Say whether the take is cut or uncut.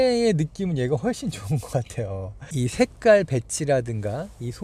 uncut